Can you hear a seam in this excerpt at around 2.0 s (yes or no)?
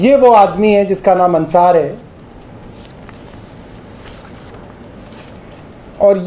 no